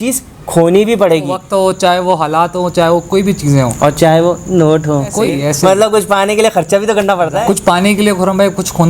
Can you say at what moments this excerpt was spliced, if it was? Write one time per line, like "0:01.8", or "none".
0:01.4
0:05.2
0:07.5

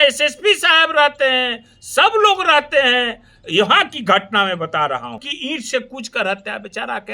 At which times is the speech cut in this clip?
0:05.3

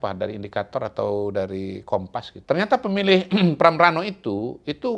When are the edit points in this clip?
0:02.3

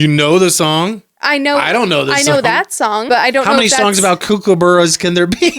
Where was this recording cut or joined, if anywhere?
0:03.0

